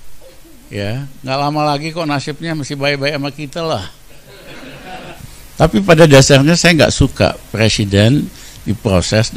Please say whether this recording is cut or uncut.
cut